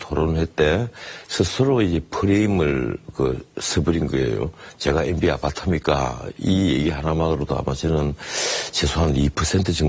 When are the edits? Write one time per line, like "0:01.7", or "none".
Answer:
none